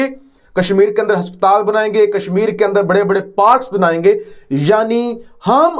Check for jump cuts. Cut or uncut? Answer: uncut